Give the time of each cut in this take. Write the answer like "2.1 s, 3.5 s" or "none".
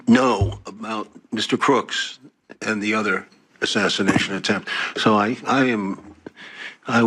none